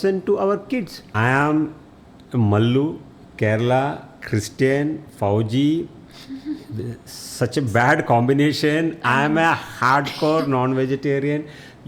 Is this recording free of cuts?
no; 1 cut; at 1.0 s

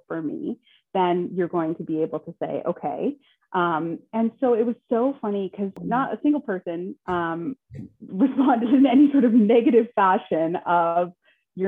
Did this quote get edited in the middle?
yes; 1 cut; at 5.8 s

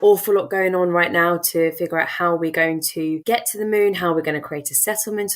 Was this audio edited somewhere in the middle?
yes; 1 cut; at 3.2 s

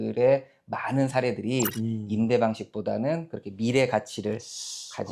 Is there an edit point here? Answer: no; 0 cuts

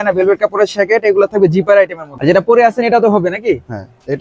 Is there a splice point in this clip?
yes; 1 cut; at 2.1 s

